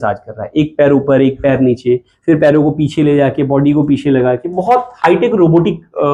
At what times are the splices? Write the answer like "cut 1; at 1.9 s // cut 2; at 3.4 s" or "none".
none